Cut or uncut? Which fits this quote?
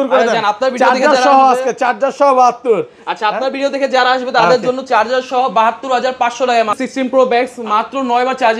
cut